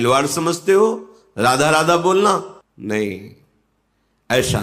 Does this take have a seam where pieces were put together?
no; 0 cuts

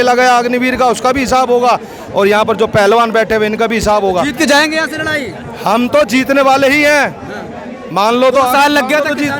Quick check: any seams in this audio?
no; 0 cuts

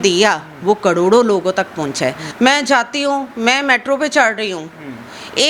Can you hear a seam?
yes; 1 cut; at 2.2 s

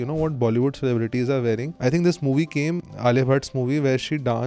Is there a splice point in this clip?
yes; 2 cuts; at 1.7 s, 2.8 s

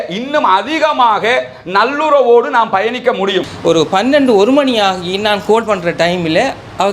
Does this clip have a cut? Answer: yes; 1 cut; at 3.5 s

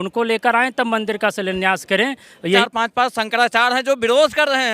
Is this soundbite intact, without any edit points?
no; 1 cut; at 2.6 s

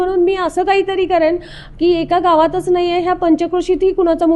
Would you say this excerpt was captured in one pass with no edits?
yes; 0 cuts

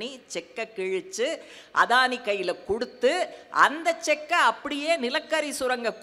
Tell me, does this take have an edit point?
no; 0 cuts

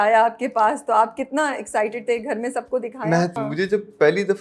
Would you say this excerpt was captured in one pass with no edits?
no; 1 cut; at 3.3 s

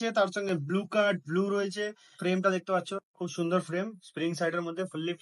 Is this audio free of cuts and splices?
no; 2 cuts; at 2.2 s, 3.0 s

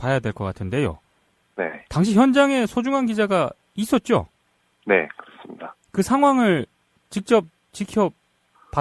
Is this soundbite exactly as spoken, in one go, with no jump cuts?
yes; 0 cuts

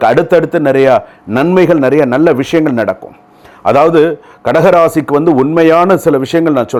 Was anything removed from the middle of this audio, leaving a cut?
no; 0 cuts

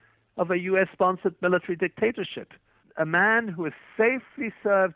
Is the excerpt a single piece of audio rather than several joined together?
no; 1 cut; at 2.8 s

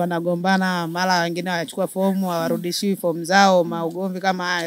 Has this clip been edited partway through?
no; 0 cuts

